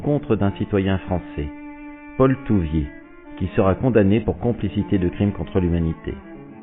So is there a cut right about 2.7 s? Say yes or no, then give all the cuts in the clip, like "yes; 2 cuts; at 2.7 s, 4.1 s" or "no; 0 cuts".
no; 1 cut; at 4.7 s